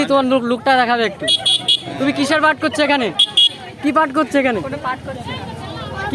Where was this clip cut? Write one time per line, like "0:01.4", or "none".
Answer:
none